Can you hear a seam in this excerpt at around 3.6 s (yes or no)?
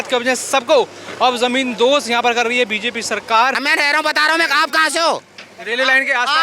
yes